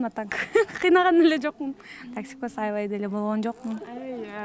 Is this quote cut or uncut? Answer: uncut